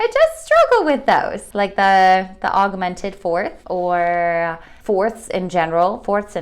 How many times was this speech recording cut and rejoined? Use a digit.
3